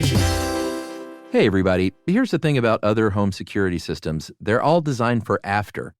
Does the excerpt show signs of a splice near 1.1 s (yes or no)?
yes